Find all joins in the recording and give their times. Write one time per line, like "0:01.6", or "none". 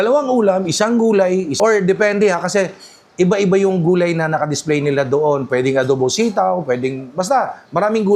0:01.5